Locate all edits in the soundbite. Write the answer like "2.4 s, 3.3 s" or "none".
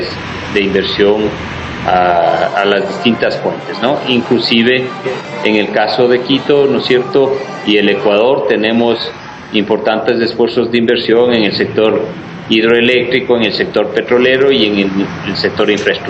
5.9 s